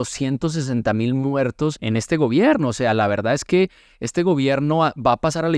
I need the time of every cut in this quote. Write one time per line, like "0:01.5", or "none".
0:01.8